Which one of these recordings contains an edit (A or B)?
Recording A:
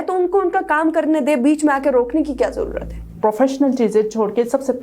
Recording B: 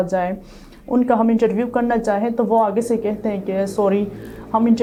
A